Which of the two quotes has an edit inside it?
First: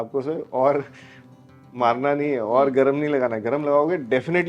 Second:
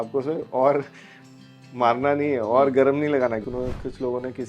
second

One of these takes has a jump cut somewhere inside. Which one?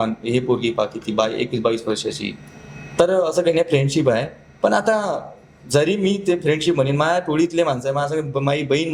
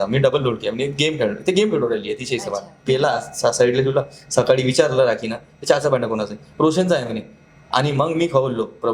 second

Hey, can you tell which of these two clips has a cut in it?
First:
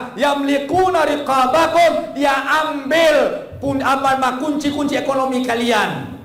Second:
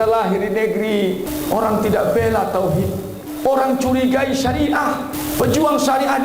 second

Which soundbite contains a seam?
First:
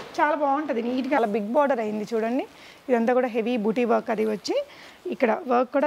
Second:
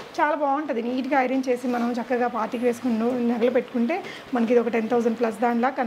first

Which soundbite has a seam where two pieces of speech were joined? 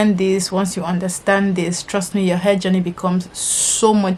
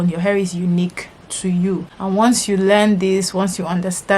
second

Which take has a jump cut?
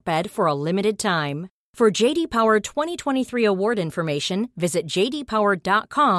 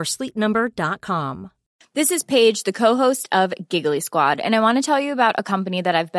second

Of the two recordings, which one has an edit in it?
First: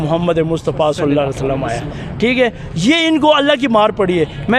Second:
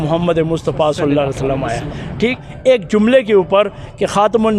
second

